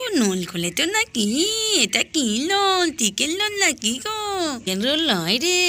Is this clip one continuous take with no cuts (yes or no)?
no